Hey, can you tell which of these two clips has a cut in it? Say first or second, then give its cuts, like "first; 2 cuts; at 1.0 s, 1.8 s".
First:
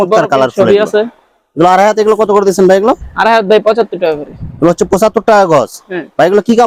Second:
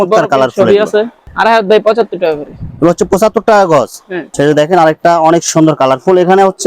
second; 2 cuts; at 1.3 s, 4.2 s